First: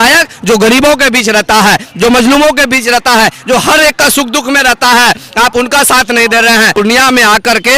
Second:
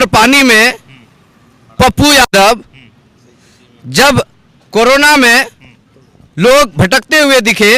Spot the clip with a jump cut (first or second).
first